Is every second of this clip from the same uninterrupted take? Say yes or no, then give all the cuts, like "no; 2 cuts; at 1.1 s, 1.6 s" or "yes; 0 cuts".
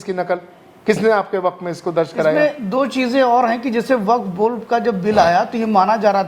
yes; 0 cuts